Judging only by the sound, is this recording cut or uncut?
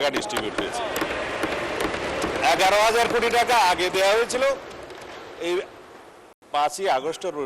uncut